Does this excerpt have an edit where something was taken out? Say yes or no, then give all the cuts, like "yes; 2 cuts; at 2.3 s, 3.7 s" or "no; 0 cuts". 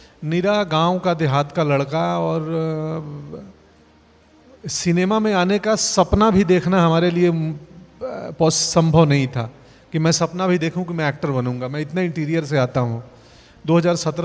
no; 0 cuts